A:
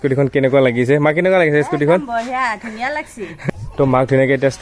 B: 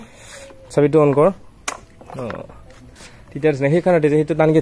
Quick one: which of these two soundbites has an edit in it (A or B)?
A